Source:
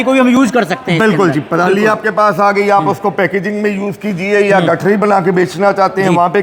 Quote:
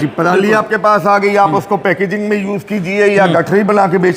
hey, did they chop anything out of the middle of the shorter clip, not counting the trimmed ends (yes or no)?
no